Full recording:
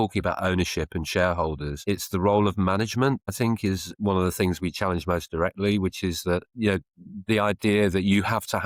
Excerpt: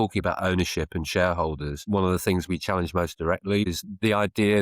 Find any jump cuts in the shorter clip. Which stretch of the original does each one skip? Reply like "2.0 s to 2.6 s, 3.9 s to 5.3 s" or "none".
1.7 s to 3.9 s, 5.8 s to 6.9 s